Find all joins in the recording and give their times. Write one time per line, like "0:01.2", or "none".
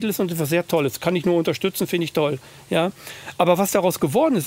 none

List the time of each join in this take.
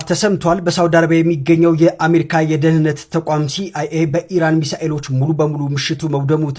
none

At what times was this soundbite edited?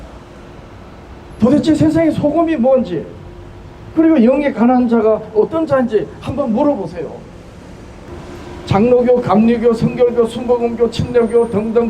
0:08.1

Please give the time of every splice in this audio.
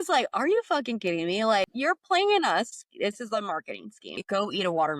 0:01.7
0:04.1

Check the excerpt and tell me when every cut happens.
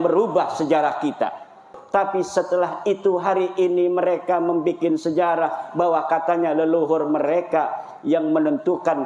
0:01.7

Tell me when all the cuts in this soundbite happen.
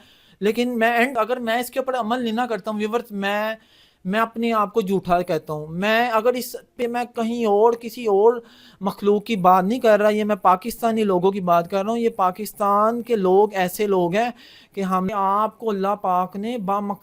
0:01.1
0:06.8
0:15.1

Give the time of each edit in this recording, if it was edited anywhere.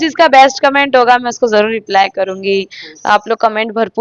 none

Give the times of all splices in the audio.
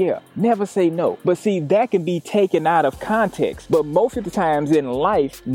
0:01.2
0:03.6

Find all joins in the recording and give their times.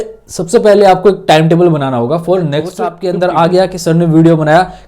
0:02.9

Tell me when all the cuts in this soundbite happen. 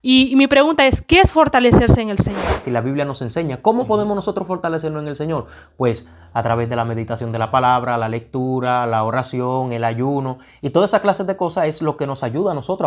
0:02.6

